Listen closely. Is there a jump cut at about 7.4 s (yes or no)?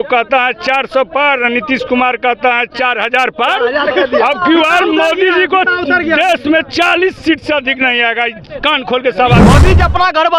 no